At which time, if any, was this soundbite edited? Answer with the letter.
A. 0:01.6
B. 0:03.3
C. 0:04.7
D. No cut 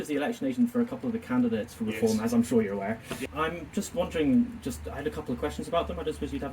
B